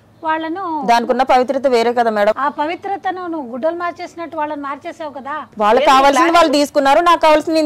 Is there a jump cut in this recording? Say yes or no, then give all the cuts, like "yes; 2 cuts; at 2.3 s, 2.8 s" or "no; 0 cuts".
yes; 2 cuts; at 2.3 s, 5.5 s